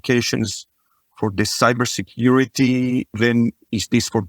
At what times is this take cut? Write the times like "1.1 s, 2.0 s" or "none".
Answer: 3.1 s